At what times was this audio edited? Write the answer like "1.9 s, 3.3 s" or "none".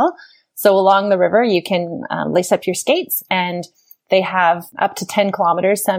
4.7 s